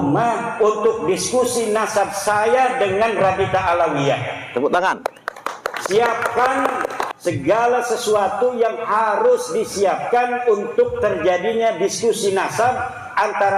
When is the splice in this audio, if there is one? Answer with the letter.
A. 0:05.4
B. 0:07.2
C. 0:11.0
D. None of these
D